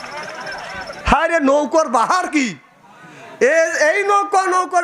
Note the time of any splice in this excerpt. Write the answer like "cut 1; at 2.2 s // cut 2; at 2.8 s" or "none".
cut 1; at 1.0 s